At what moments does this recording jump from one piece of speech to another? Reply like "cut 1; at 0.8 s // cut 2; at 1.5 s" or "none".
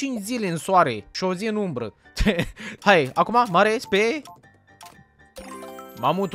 cut 1; at 1.1 s // cut 2; at 2.8 s